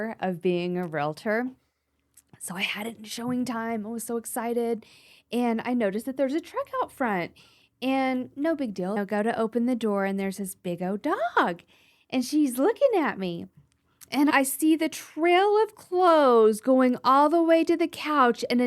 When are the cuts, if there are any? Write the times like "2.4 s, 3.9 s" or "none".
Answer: 9.0 s, 14.3 s